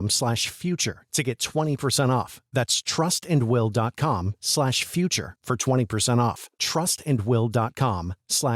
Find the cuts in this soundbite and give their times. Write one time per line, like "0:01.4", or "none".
none